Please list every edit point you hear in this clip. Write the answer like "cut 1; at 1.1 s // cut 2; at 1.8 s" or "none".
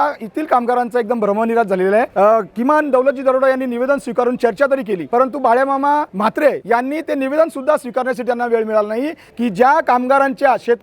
cut 1; at 2.1 s // cut 2; at 5.0 s // cut 3; at 6.5 s // cut 4; at 9.2 s